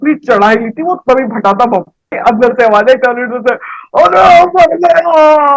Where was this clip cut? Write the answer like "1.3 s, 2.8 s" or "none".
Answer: 2.2 s